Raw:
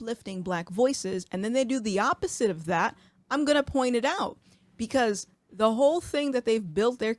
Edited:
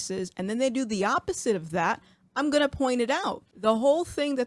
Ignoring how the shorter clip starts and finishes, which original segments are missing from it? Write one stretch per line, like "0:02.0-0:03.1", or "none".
0:04.4-0:05.4